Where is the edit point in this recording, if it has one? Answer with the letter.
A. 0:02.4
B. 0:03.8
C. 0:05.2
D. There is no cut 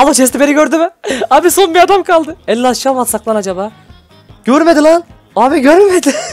C